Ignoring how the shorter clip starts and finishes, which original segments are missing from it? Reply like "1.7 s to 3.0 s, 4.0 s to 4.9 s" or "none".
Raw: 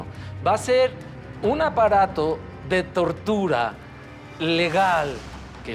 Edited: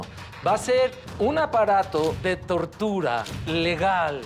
1.0 s to 1.3 s, 2.4 s to 2.6 s, 3.8 s to 4.3 s